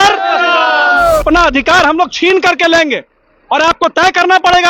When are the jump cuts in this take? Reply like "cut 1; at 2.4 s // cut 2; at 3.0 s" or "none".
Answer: cut 1; at 1.2 s